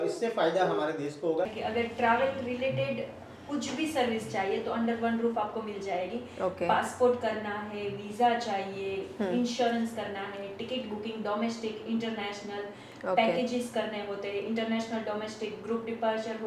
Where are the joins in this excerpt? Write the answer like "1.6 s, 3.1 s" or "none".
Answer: 1.5 s